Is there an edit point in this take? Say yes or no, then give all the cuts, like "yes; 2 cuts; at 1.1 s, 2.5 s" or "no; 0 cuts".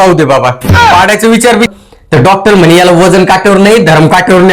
yes; 1 cut; at 1.7 s